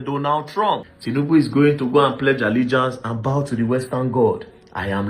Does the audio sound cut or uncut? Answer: cut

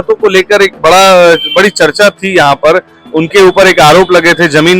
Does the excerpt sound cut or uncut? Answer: cut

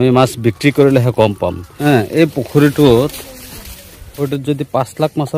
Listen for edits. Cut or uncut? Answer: cut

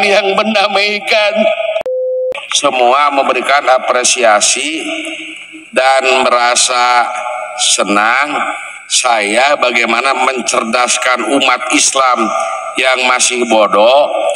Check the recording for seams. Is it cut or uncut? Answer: cut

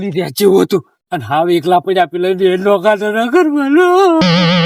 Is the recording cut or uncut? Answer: uncut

